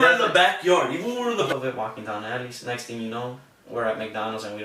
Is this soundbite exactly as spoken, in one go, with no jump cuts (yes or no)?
no